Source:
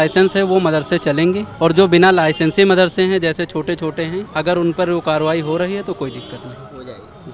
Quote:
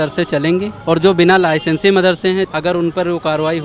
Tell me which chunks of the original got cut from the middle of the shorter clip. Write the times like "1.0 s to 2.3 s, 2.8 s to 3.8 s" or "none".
3.2 s to 4.3 s